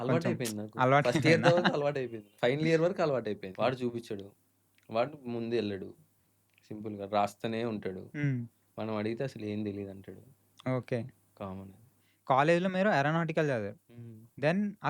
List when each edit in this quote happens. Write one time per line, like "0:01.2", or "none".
0:02.2
0:03.5
0:12.1